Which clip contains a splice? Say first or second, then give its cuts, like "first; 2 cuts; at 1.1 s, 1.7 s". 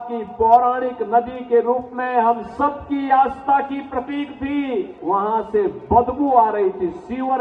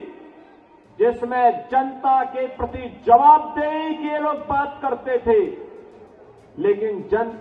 first; 1 cut; at 4.9 s